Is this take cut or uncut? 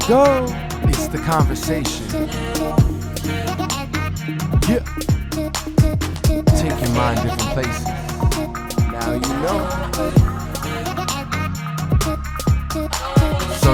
uncut